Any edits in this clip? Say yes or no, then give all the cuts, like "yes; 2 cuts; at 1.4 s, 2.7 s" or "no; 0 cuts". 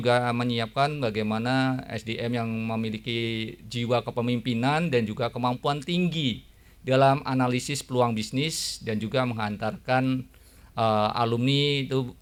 no; 0 cuts